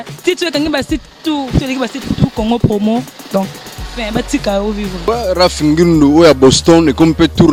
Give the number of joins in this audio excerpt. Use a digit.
0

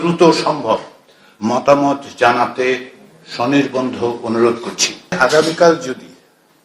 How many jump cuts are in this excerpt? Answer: 1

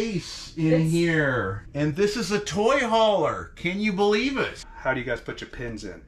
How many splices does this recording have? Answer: 2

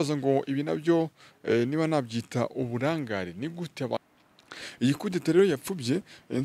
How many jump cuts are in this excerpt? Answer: 1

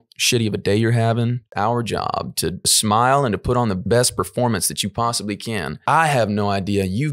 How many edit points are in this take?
4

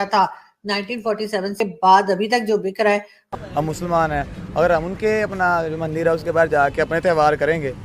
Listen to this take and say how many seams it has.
2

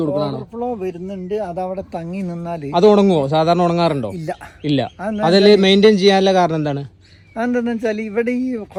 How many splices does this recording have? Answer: 0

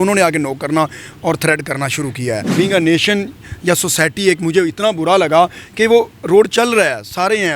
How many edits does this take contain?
1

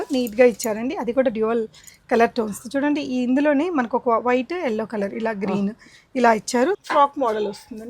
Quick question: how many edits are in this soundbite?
1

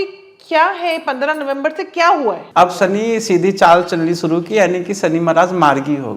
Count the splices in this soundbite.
1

